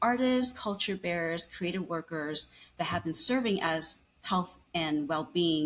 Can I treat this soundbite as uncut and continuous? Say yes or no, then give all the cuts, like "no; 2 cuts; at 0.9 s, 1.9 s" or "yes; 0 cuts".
yes; 0 cuts